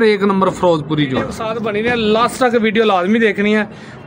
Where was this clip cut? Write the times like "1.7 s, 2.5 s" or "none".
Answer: 1.5 s